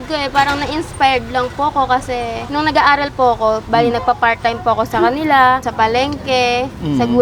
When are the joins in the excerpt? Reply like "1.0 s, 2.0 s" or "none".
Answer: none